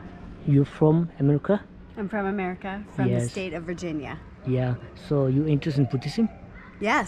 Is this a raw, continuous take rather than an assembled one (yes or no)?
yes